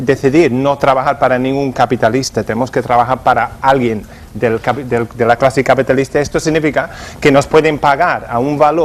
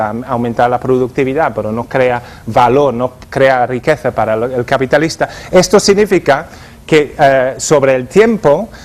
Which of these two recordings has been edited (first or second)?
first